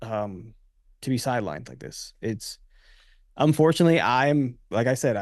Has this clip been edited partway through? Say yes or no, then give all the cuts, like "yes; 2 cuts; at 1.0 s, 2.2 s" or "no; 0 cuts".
no; 0 cuts